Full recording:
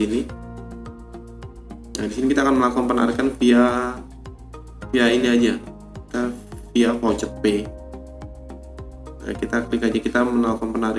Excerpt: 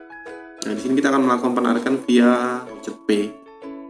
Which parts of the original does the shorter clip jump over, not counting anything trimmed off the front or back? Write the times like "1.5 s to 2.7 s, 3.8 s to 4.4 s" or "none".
4.3 s to 7.3 s